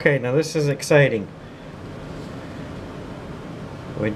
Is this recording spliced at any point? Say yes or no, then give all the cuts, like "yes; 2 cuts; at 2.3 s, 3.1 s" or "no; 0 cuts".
yes; 1 cut; at 1.7 s